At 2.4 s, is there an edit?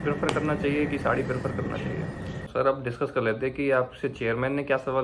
yes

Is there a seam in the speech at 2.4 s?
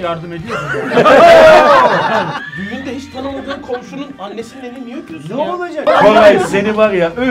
yes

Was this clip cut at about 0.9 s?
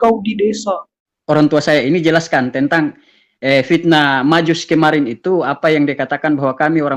yes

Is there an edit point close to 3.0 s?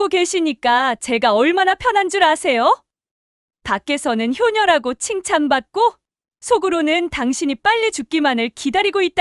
no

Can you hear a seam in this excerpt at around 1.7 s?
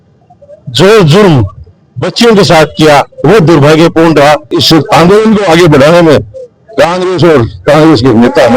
no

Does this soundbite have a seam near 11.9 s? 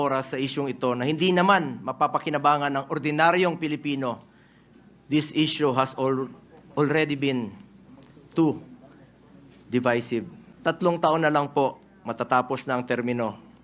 no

